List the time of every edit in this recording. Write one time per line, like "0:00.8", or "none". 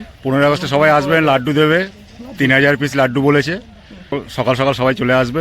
0:04.1